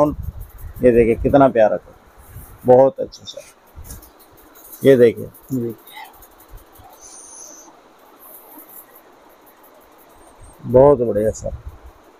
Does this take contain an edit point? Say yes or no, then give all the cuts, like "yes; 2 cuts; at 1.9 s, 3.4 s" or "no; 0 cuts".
no; 0 cuts